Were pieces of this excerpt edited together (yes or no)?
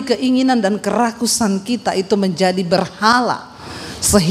no